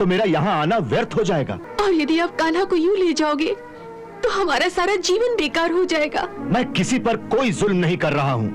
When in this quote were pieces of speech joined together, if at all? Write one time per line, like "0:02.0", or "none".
0:01.6
0:06.4